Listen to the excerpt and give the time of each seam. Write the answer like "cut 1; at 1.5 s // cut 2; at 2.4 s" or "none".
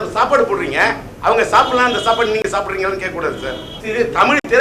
cut 1; at 3.7 s

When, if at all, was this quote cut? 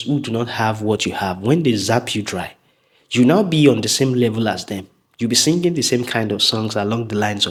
none

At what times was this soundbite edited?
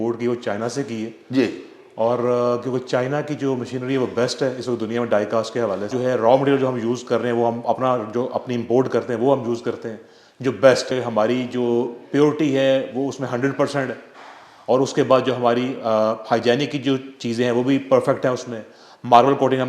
cut 1; at 5.9 s // cut 2; at 10.9 s

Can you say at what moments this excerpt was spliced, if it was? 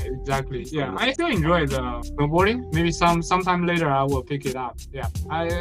cut 1; at 1.1 s // cut 2; at 2.1 s

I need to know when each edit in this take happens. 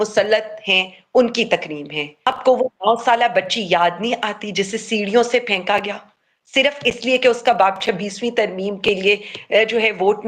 cut 1; at 2.2 s

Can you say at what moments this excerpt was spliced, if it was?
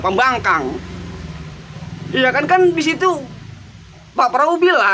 none

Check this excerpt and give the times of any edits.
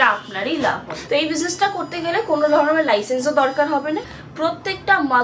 cut 1; at 1.0 s // cut 2; at 4.2 s

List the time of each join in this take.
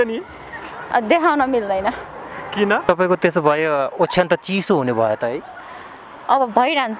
cut 1; at 2.8 s

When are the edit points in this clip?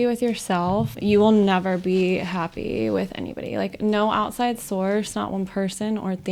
cut 1; at 1.0 s

